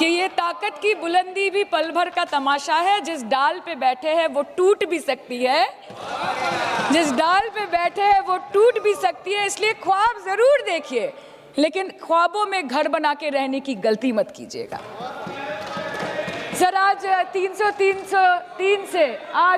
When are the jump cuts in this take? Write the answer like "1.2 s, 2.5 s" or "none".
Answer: none